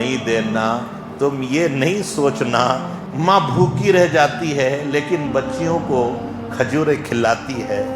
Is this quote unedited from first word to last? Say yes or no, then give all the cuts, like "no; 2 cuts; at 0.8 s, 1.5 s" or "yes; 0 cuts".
no; 1 cut; at 3.0 s